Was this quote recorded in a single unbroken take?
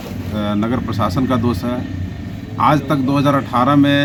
yes; 0 cuts

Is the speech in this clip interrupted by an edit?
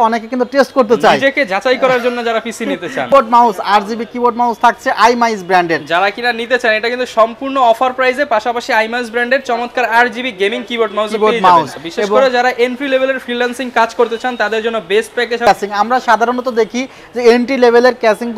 yes; 3 cuts; at 3.1 s, 11.8 s, 15.5 s

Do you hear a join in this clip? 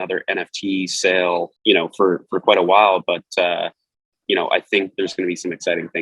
yes; 1 cut; at 1.5 s

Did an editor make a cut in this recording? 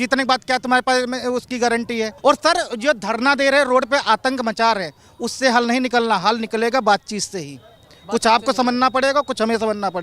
yes; 1 cut; at 2.1 s

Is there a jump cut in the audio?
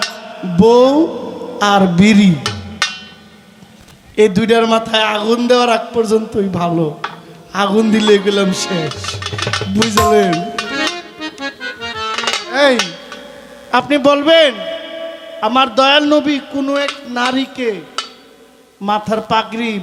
no; 0 cuts

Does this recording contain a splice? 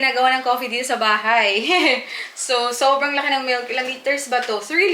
no; 0 cuts

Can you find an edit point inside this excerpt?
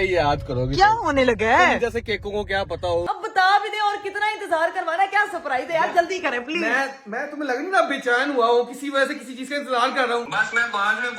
yes; 2 cuts; at 3.0 s, 10.3 s

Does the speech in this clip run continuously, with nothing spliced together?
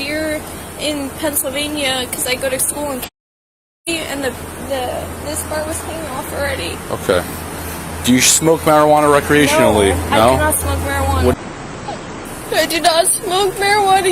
no; 1 cut; at 11.3 s

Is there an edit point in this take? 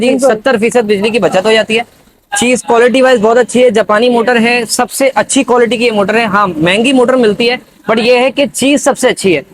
no; 0 cuts

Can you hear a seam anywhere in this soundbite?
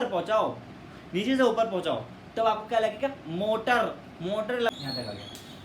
yes; 1 cut; at 4.7 s

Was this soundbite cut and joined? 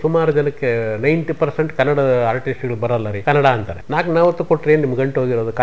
yes; 2 cuts; at 3.1 s, 3.7 s

